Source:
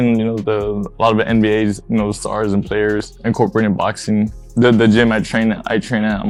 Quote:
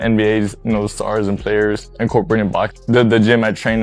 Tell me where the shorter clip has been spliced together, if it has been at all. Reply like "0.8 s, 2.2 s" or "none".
2.7 s